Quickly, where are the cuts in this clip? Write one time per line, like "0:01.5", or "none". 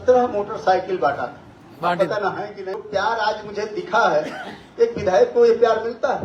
0:02.8

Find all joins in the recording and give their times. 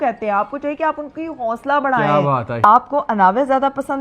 0:02.6

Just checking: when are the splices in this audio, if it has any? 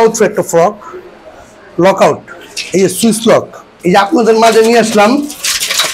0:03.7

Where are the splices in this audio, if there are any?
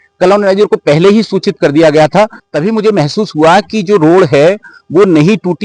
0:02.4

